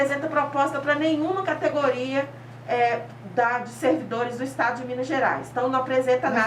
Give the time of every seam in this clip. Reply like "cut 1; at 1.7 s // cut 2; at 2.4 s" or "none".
none